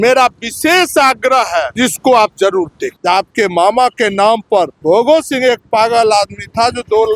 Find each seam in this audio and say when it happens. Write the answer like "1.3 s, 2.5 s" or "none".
1.7 s, 2.9 s, 4.8 s